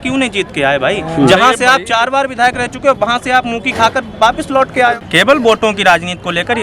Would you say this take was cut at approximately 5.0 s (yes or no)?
yes